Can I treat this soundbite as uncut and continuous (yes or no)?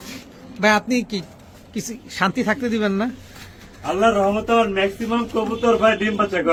yes